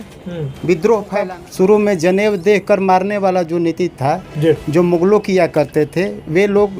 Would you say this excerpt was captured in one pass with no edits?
no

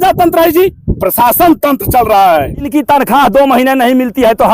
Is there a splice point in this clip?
yes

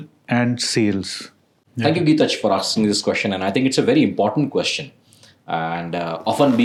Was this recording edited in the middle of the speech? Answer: no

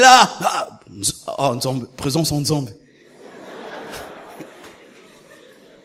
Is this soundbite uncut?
yes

